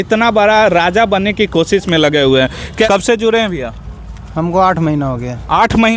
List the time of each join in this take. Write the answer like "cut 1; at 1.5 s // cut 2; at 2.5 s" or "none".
cut 1; at 2.9 s